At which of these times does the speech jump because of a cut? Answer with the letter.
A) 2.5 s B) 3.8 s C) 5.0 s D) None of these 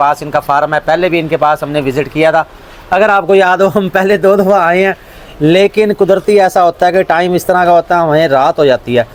D